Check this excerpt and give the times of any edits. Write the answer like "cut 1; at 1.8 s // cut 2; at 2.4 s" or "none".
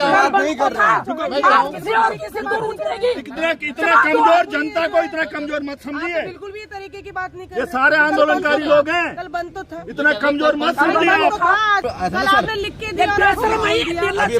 cut 1; at 11.9 s